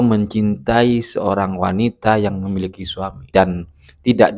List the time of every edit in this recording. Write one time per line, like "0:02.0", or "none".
0:03.3